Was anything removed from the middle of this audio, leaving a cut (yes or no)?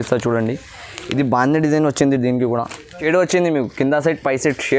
yes